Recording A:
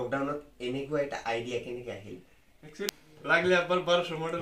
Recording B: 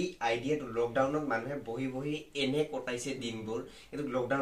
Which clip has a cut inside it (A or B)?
A